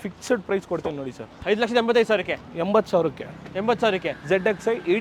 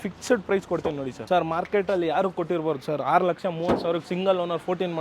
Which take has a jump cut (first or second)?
second